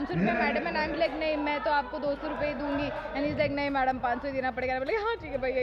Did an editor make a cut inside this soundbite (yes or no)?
no